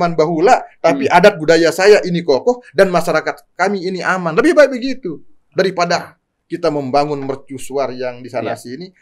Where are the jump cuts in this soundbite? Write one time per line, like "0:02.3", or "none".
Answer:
none